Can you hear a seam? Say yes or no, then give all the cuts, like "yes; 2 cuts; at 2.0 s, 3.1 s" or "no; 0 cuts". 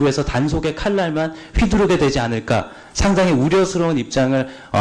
yes; 1 cut; at 3.5 s